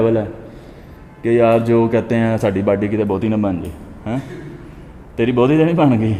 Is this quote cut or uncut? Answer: uncut